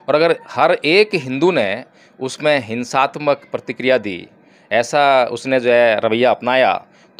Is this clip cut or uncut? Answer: uncut